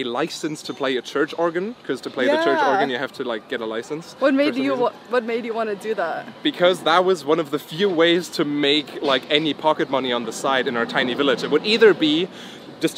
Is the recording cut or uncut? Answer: uncut